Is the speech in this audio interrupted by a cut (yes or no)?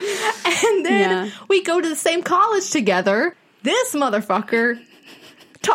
yes